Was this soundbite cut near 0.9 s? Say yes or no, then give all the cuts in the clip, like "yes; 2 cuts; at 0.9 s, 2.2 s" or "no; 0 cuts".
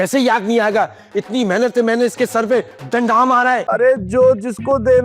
no; 1 cut; at 3.6 s